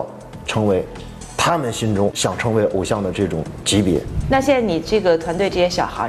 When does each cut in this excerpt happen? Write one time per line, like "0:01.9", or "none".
0:02.2
0:04.1